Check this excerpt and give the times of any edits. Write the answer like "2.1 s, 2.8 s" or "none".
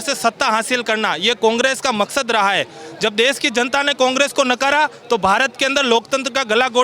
none